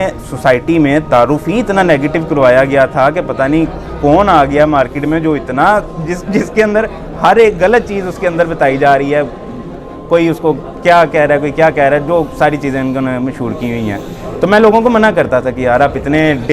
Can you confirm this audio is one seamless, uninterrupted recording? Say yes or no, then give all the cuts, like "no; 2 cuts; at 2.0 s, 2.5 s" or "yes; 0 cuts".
yes; 0 cuts